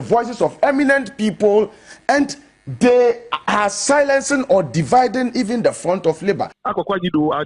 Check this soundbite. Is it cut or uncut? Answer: cut